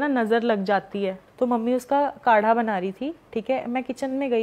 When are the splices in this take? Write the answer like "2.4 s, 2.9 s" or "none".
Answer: 1.2 s

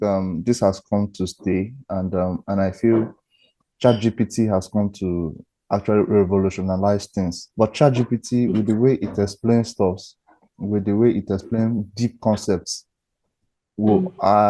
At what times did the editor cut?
7.4 s

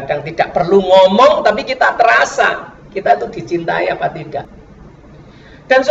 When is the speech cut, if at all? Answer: 4.5 s

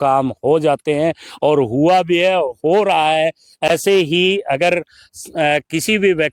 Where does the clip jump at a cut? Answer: none

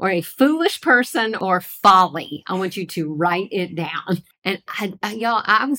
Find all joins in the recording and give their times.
1.3 s, 4.3 s

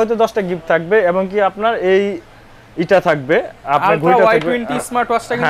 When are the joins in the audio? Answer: none

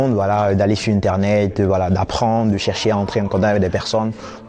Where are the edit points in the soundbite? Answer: none

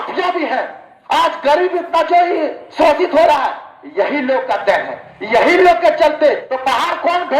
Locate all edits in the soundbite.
6.5 s

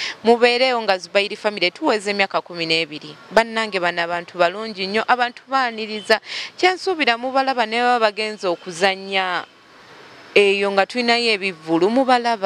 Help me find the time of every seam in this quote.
none

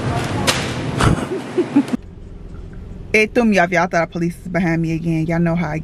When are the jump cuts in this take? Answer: 1.9 s

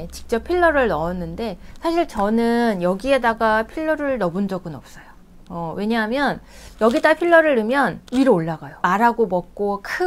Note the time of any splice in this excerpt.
none

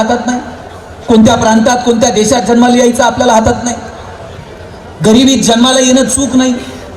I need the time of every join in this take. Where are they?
none

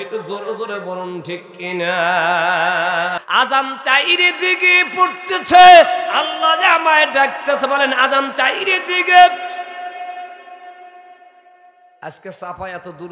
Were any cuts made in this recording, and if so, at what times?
3.2 s

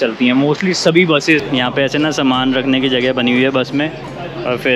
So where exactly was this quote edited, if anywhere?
1.4 s

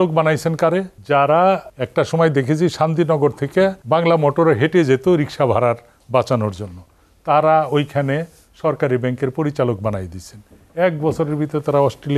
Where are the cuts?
0.9 s, 1.8 s, 3.8 s

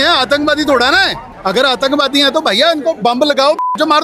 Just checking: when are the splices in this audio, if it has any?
1.2 s

